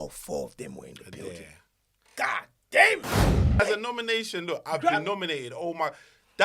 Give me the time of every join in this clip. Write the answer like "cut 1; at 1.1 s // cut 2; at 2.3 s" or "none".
cut 1; at 3.6 s